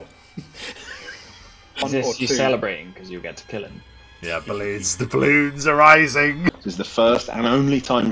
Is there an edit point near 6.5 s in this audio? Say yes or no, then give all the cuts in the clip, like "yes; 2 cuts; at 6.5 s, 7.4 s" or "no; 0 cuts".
yes; 2 cuts; at 1.9 s, 6.5 s